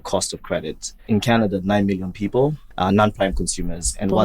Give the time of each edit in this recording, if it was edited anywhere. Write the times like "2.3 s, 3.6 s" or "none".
1.0 s, 2.7 s